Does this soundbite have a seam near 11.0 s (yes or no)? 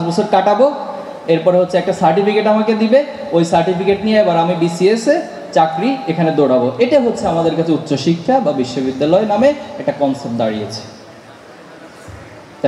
no